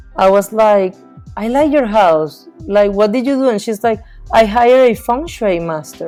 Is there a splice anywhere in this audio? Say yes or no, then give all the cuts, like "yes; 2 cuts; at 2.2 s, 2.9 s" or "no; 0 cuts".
no; 0 cuts